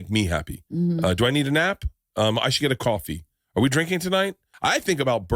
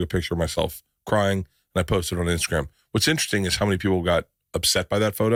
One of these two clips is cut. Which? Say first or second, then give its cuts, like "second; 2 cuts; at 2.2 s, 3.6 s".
first; 1 cut; at 4.5 s